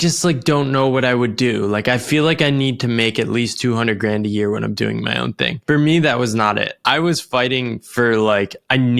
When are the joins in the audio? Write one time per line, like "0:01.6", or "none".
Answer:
0:05.6
0:06.7